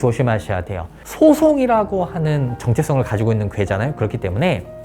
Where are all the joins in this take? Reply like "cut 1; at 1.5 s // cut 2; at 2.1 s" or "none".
cut 1; at 1.0 s